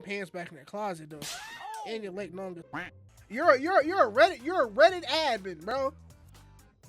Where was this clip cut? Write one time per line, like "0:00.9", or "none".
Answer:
0:02.6